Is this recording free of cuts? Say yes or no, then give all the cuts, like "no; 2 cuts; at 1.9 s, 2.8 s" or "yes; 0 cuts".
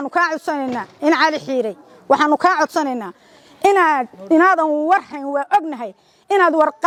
yes; 0 cuts